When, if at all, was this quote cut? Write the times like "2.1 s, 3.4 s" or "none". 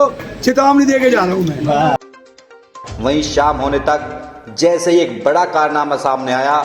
none